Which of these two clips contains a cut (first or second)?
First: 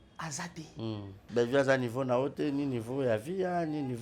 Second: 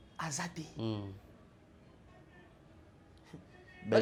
first